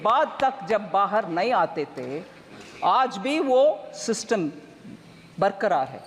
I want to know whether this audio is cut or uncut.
uncut